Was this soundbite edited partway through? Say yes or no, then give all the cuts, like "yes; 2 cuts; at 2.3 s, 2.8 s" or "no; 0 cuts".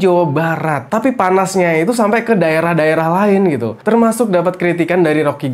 no; 0 cuts